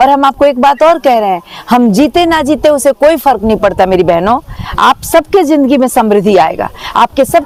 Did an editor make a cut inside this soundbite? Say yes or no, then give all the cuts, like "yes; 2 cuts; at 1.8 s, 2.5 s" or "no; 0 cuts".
no; 0 cuts